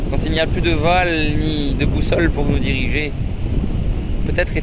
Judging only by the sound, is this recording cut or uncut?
uncut